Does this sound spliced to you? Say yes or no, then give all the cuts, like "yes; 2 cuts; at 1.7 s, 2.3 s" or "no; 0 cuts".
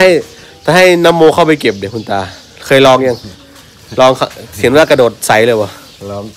no; 0 cuts